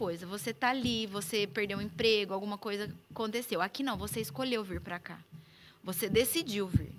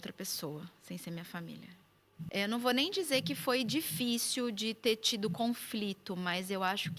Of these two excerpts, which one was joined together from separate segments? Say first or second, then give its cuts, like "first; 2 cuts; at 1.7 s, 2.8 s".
second; 1 cut; at 2.3 s